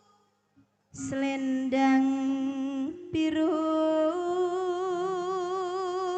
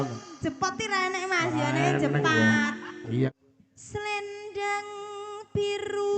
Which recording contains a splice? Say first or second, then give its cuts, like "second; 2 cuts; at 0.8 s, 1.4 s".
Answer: second; 1 cut; at 3.3 s